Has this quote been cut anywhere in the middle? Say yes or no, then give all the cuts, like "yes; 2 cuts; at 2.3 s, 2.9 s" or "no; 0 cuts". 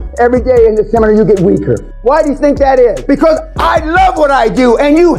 yes; 2 cuts; at 1.9 s, 3.0 s